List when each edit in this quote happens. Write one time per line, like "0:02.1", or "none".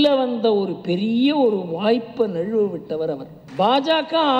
0:03.4